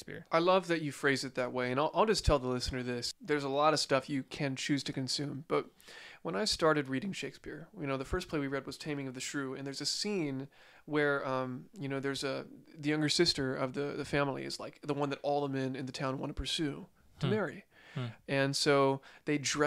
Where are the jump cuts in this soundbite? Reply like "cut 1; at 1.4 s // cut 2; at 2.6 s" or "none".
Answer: cut 1; at 3.1 s